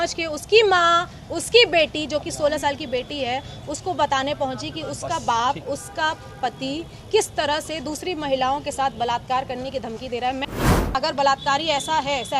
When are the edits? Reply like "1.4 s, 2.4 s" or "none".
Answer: 10.6 s